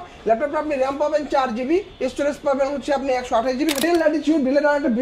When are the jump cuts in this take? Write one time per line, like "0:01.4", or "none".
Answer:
0:03.8